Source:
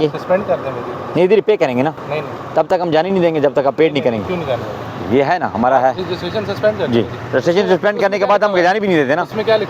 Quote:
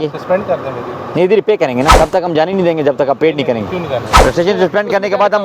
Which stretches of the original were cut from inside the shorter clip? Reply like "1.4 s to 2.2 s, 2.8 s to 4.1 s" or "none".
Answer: 1.9 s to 2.5 s, 4.7 s to 7.2 s